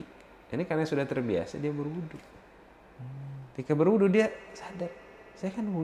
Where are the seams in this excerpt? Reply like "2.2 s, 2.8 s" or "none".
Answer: none